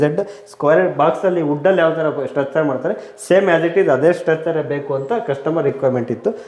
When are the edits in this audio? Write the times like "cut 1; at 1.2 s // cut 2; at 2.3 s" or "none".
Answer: none